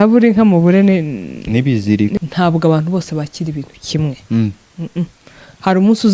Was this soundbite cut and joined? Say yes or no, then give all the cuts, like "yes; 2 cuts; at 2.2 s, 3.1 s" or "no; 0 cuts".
yes; 1 cut; at 2.1 s